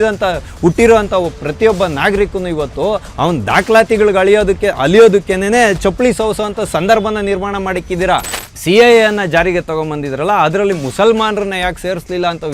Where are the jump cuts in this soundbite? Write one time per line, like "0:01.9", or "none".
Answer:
0:08.3